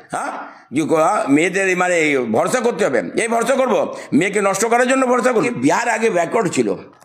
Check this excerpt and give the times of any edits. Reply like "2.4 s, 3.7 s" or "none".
5.3 s